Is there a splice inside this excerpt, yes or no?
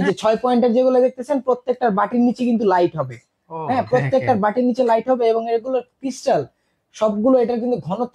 no